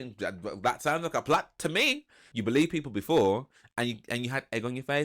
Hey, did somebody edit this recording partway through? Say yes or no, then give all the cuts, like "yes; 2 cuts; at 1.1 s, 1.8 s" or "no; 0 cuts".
yes; 1 cut; at 2.2 s